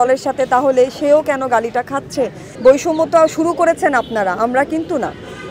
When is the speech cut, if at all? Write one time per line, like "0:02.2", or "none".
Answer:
0:02.4